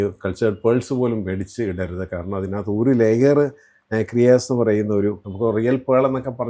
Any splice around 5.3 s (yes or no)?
yes